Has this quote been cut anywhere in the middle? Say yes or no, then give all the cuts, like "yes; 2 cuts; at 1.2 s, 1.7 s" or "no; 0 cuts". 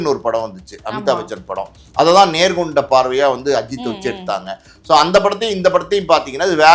no; 0 cuts